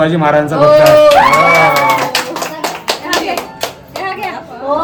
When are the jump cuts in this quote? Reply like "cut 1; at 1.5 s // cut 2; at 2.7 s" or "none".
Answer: none

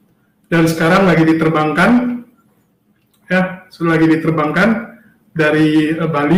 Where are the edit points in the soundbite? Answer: none

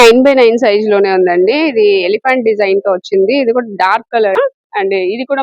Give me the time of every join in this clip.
cut 1; at 4.4 s

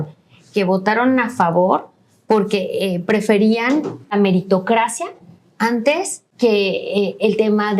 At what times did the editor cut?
cut 1; at 4.1 s // cut 2; at 6.2 s

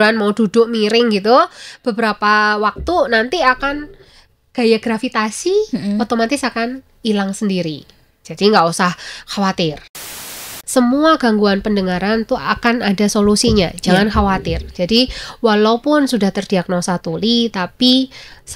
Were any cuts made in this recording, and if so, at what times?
cut 1; at 10.2 s

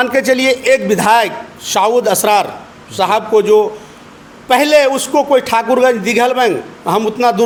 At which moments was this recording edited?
none

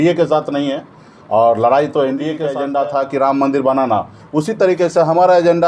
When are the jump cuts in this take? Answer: cut 1; at 2.5 s

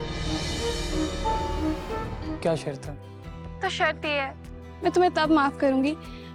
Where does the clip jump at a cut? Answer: cut 1; at 2.3 s

